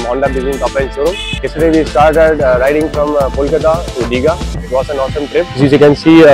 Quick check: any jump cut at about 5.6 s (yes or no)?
yes